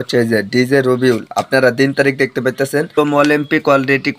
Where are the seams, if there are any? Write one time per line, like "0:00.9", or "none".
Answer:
0:02.9